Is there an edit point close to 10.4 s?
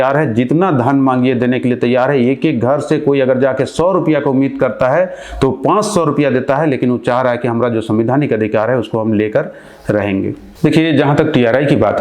yes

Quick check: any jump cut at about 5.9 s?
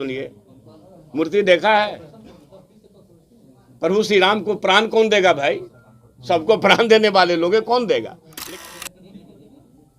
no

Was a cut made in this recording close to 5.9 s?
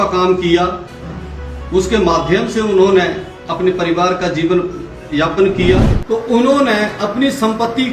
yes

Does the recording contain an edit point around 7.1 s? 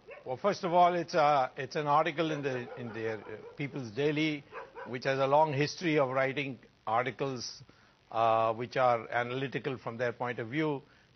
yes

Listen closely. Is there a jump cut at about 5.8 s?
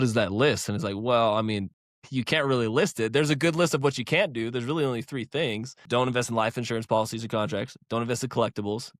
yes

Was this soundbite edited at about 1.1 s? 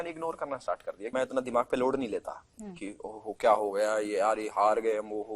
yes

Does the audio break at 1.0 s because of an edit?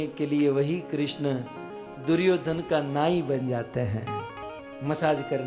no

